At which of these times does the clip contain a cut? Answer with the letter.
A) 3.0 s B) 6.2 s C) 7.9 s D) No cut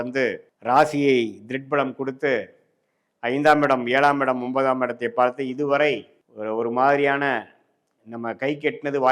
D